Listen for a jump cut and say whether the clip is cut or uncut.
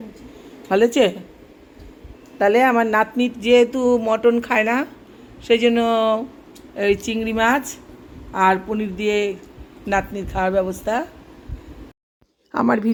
uncut